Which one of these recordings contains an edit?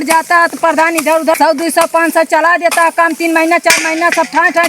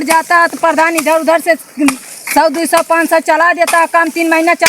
first; 1 cut; at 1.3 s

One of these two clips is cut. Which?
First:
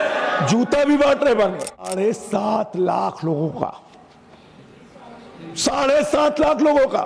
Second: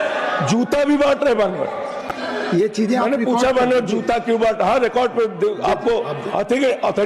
first; 1 cut; at 1.9 s

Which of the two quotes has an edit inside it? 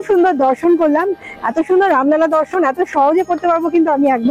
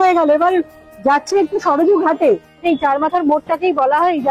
second; 1 cut; at 2.6 s

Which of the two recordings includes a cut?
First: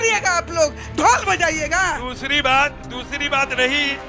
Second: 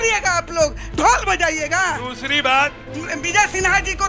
second; 1 cut; at 2.9 s

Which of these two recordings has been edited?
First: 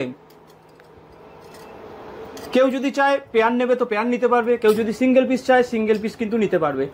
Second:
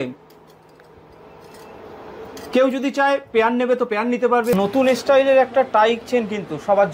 second; 1 cut; at 4.5 s

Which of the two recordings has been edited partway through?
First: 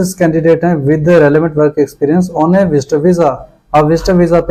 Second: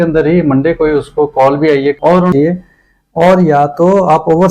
second; 1 cut; at 2.0 s

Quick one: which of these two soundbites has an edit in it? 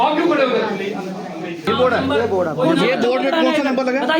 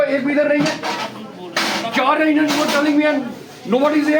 first; 1 cut; at 1.7 s

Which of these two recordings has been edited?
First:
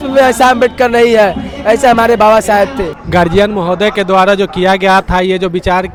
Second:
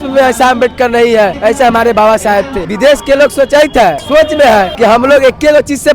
second; 4 cuts; at 1.4 s, 2.6 s, 4.0 s, 4.7 s

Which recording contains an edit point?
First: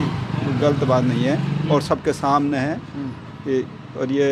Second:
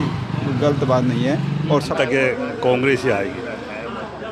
second; 1 cut; at 1.9 s

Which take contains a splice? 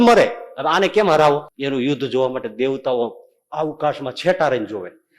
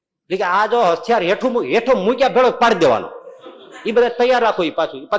first; 1 cut; at 1.5 s

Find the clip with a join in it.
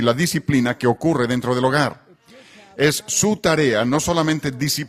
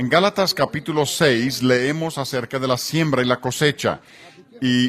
second; 1 cut; at 2.6 s

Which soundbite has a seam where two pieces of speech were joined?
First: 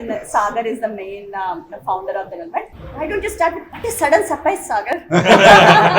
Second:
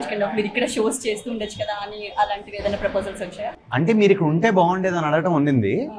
first; 2 cuts; at 2.8 s, 3.7 s

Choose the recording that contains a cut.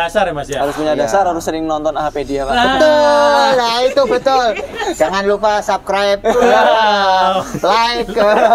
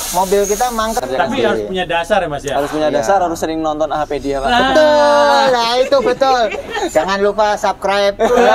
second; 1 cut; at 1.0 s

